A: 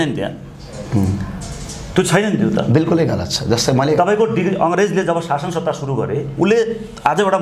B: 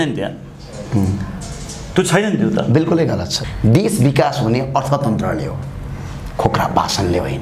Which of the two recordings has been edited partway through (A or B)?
B